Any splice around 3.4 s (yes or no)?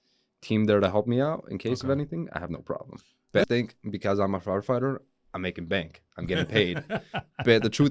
yes